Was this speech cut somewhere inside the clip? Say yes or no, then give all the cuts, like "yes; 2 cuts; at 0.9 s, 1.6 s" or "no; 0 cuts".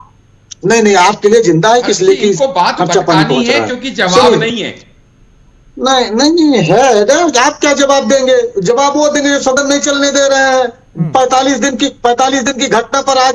no; 0 cuts